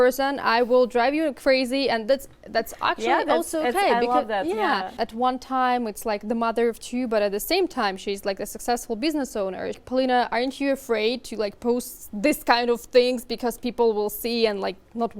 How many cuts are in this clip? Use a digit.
2